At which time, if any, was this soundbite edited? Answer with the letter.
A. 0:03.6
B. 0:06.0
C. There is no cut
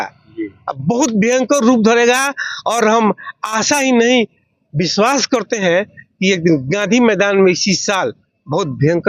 C